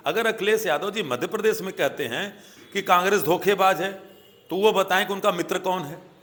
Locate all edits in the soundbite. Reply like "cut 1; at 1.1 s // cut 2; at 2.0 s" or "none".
none